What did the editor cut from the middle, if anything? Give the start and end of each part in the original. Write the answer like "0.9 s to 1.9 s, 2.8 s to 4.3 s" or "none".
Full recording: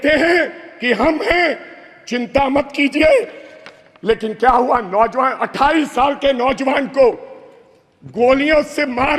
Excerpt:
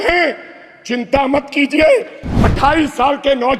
3.7 s to 5.4 s